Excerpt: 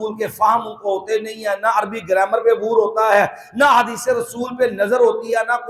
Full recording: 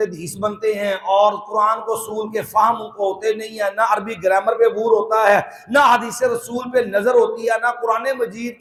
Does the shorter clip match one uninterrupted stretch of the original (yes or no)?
yes